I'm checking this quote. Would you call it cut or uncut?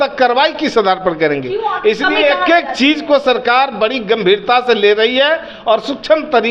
uncut